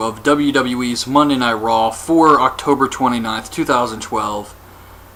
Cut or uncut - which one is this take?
uncut